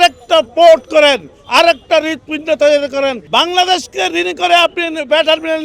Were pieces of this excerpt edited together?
yes; 1 cut; at 3.2 s

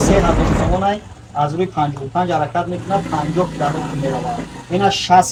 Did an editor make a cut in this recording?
no; 0 cuts

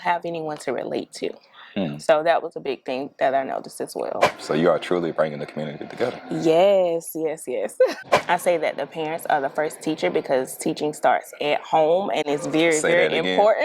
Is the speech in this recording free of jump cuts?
no; 2 cuts; at 4.3 s, 8.1 s

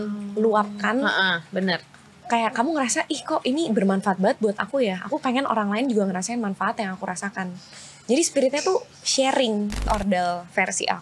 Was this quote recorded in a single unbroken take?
no; 1 cut; at 9.9 s

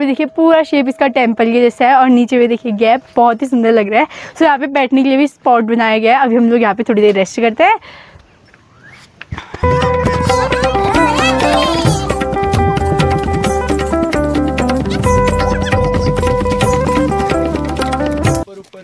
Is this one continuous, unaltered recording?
yes; 0 cuts

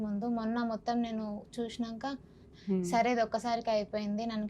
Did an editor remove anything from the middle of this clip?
yes; 1 cut; at 2.5 s

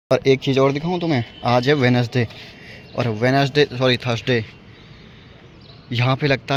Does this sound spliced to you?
no; 0 cuts

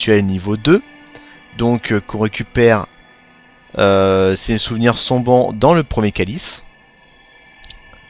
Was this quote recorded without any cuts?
no; 1 cut; at 1.6 s

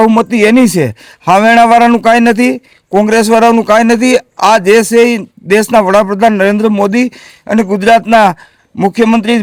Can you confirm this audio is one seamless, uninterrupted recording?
yes; 0 cuts

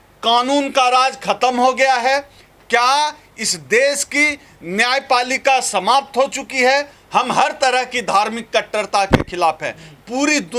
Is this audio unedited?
no; 1 cut; at 7.0 s

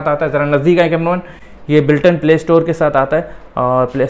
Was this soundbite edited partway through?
no; 0 cuts

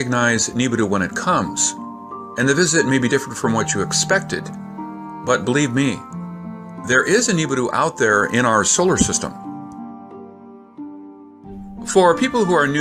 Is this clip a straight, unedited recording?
yes; 0 cuts

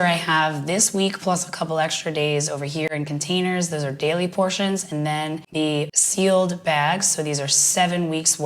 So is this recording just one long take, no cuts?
no; 1 cut; at 5.7 s

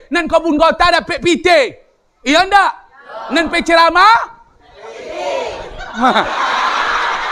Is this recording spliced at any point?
no; 0 cuts

